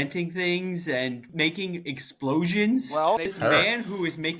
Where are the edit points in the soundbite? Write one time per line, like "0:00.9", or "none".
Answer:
0:01.3
0:03.3